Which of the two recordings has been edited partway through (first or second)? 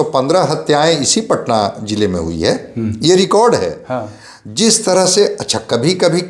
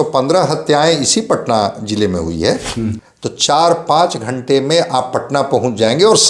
second